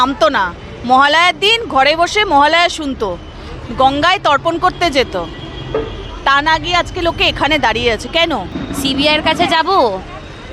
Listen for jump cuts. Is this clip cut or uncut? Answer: cut